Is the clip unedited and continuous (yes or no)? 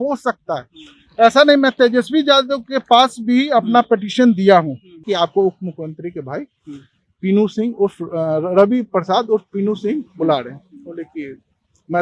no